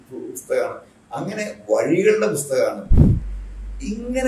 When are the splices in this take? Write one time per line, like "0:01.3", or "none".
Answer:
0:03.0